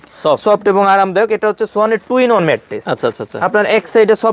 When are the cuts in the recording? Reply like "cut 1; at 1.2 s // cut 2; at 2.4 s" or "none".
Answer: none

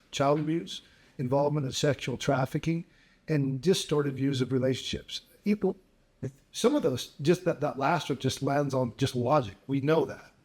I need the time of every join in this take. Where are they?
none

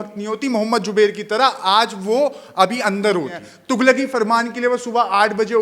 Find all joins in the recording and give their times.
cut 1; at 3.5 s

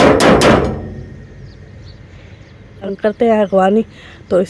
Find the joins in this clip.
cut 1; at 3.0 s

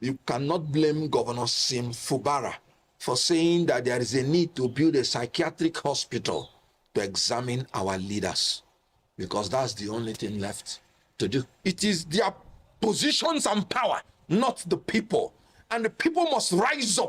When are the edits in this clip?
cut 1; at 11.5 s

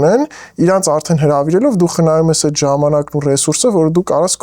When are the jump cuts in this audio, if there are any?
none

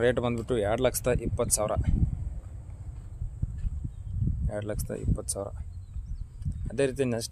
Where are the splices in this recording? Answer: none

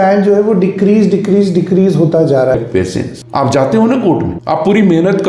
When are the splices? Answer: cut 1; at 2.5 s

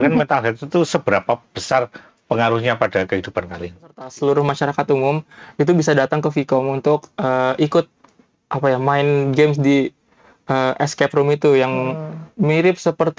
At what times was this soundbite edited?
cut 1; at 4.0 s

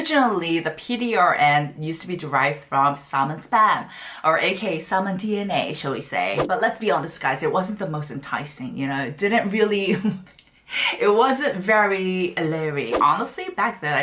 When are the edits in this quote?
cut 1; at 6.4 s // cut 2; at 12.9 s

